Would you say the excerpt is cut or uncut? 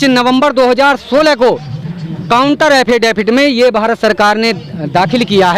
uncut